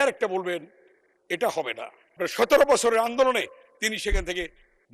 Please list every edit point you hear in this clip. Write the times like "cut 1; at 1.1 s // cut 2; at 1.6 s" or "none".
cut 1; at 2.2 s